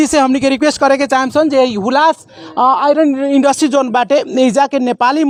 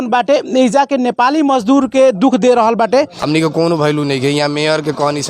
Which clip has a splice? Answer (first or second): second